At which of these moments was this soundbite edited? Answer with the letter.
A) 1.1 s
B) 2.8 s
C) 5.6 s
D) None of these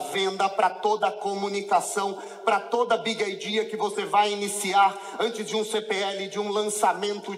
D